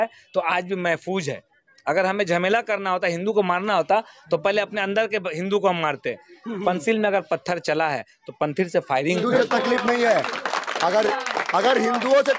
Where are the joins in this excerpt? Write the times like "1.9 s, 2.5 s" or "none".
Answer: 9.2 s